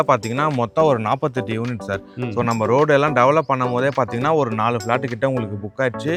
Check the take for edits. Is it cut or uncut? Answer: uncut